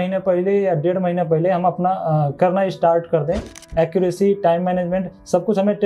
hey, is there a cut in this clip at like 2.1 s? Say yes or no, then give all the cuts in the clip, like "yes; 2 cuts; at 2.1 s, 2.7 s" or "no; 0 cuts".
no; 1 cut; at 3.5 s